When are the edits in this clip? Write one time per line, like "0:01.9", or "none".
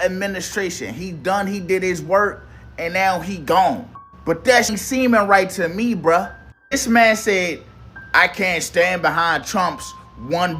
0:04.7